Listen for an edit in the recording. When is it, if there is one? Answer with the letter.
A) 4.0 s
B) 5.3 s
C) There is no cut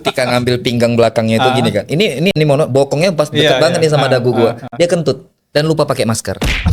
B